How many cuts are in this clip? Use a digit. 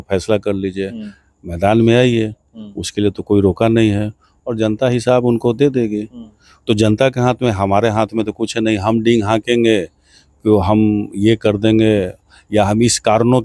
0